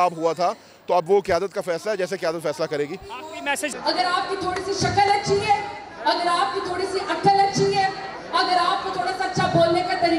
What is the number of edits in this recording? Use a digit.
1